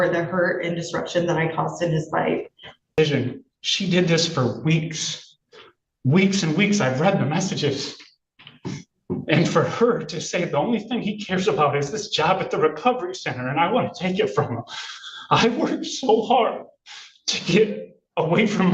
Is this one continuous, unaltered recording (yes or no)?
no